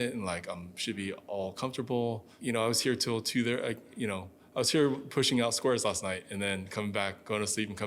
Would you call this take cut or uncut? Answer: cut